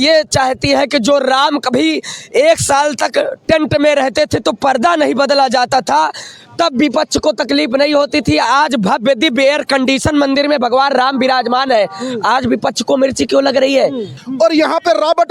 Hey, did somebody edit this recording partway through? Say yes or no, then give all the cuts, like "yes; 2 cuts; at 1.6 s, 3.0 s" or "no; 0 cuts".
yes; 1 cut; at 14.2 s